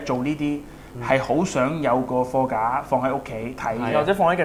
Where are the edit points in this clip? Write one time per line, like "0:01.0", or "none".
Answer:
none